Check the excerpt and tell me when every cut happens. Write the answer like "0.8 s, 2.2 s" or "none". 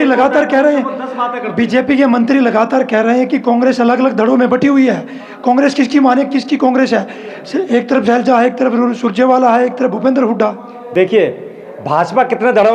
none